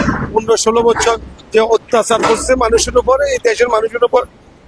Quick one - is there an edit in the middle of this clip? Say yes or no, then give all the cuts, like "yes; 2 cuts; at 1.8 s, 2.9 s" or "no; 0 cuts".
no; 0 cuts